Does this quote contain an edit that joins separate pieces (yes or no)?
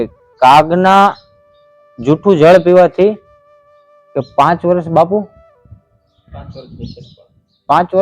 no